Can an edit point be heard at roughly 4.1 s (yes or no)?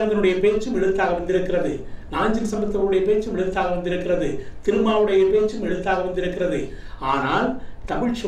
no